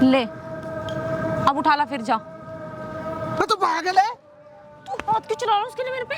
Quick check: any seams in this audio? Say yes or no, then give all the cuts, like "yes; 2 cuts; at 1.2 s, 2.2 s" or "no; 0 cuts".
no; 0 cuts